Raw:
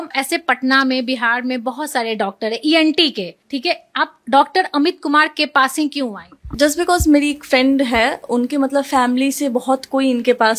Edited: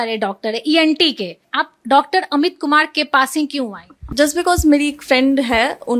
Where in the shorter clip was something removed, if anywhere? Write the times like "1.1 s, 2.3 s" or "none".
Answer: 1.4 s

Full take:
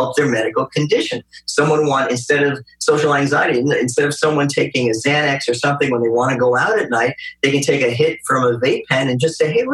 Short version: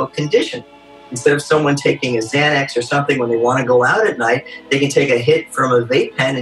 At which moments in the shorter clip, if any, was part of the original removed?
1.0 s

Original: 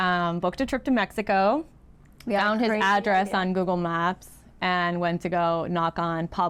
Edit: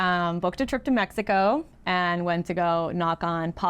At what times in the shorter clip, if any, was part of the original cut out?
1.8 s

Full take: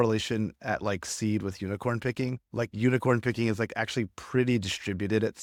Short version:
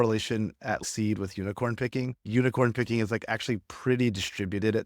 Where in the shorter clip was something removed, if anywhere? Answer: 0.8 s, 2.2 s

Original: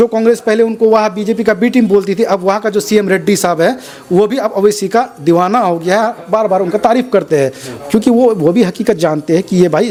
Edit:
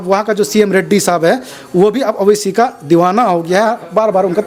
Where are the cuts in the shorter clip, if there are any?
none

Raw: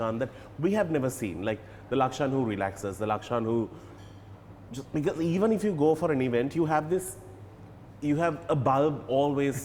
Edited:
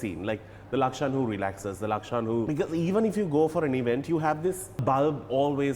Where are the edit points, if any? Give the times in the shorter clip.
2.5 s, 4.8 s

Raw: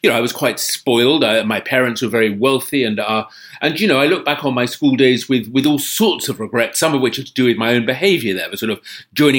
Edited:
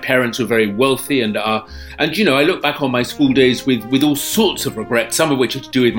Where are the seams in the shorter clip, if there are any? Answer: none

